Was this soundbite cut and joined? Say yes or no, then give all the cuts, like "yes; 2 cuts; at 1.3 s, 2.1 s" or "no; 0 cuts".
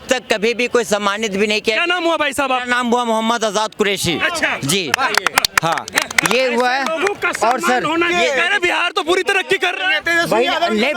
yes; 1 cut; at 8.1 s